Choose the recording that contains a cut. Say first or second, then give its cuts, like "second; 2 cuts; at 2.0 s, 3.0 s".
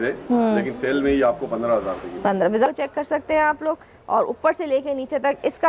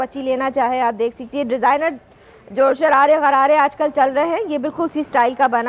first; 1 cut; at 2.7 s